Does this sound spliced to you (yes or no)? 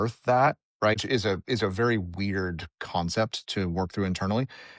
yes